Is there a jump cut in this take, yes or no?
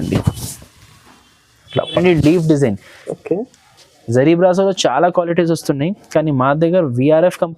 yes